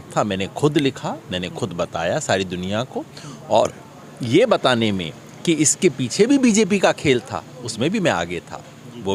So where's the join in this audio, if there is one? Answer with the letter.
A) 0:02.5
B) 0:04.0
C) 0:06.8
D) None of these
D